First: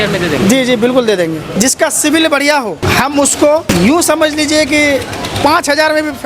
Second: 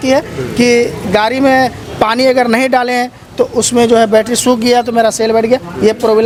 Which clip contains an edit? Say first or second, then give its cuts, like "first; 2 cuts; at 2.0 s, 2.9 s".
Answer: first; 3 cuts; at 1.5 s, 2.8 s, 3.7 s